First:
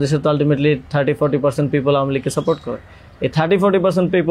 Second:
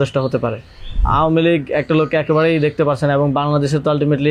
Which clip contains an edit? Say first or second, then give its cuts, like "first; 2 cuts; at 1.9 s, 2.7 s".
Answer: second; 1 cut; at 1.0 s